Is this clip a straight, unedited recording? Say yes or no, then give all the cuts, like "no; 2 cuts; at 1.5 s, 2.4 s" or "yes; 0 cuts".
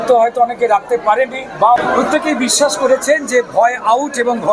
no; 1 cut; at 1.8 s